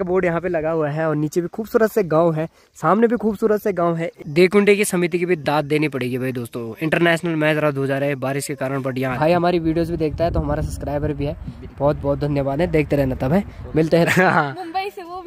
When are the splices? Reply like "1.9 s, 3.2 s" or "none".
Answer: 4.1 s, 9.1 s, 14.1 s